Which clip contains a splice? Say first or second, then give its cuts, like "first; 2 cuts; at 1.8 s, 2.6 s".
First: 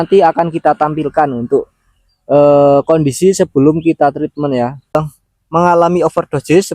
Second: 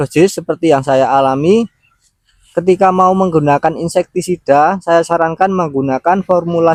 first; 1 cut; at 5.0 s